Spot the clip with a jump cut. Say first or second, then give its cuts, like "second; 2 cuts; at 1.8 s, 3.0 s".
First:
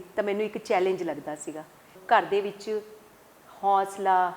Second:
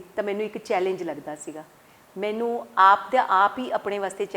first; 1 cut; at 2.0 s